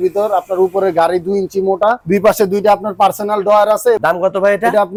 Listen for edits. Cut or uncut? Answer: uncut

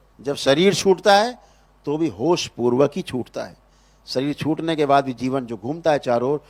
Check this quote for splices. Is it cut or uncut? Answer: uncut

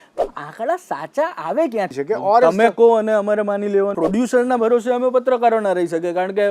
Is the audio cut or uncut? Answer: cut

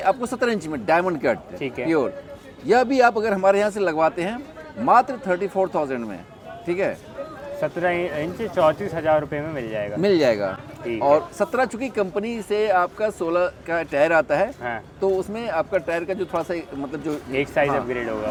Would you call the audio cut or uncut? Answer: uncut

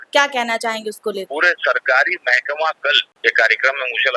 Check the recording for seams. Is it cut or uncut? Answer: cut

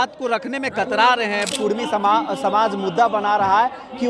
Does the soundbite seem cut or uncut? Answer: cut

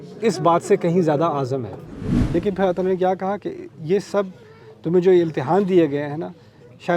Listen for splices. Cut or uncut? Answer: cut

